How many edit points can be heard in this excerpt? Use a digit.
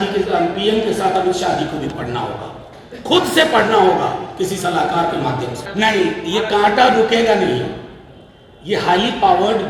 0